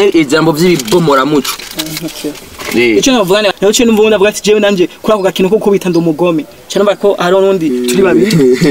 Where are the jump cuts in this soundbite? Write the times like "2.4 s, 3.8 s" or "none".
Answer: 3.5 s